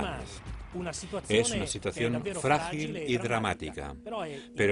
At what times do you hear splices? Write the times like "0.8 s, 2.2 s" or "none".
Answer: none